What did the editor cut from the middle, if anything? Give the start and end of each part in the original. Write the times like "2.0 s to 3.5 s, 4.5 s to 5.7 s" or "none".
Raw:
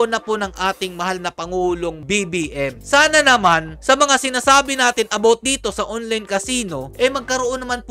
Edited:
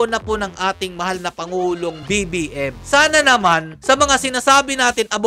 none